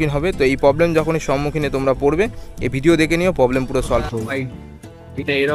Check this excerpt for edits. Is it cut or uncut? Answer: cut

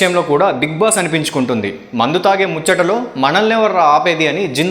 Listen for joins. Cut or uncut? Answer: uncut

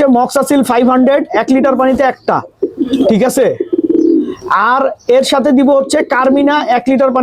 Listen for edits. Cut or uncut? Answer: uncut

